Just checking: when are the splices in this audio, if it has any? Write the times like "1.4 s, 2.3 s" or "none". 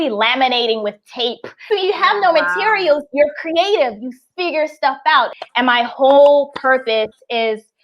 1.5 s, 5.4 s